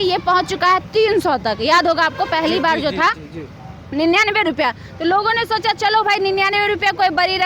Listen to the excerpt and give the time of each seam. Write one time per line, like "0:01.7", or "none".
none